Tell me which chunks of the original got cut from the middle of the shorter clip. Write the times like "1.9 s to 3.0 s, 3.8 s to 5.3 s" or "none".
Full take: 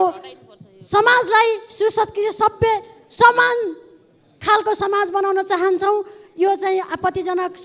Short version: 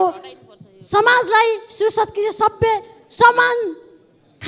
none